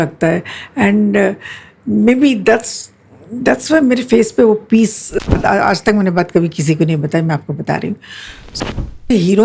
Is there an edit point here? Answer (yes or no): yes